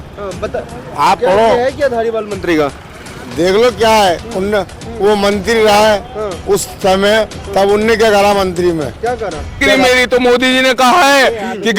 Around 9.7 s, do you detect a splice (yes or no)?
yes